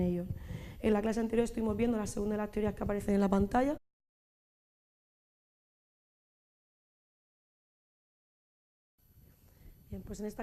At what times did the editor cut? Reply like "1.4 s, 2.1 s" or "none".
none

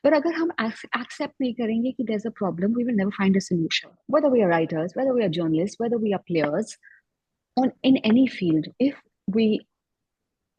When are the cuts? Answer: 4.0 s

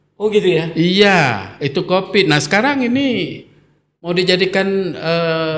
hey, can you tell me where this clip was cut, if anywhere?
none

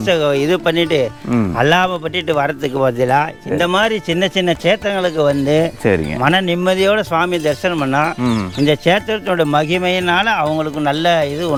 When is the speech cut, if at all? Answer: none

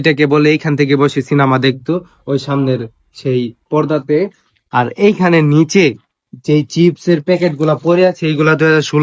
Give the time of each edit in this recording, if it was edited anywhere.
none

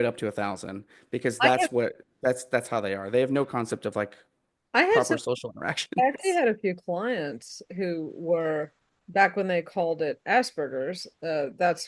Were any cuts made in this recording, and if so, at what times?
none

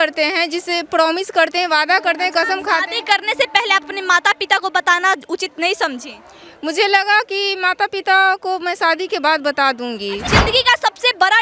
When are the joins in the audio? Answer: 10.3 s

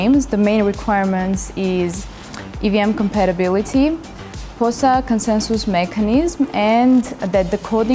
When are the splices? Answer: none

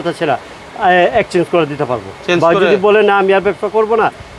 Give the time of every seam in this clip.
none

